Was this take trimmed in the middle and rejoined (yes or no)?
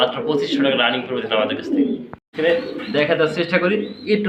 yes